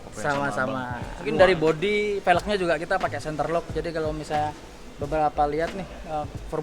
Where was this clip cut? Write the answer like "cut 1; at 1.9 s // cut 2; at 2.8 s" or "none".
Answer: cut 1; at 1.1 s